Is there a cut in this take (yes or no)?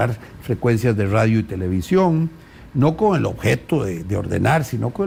no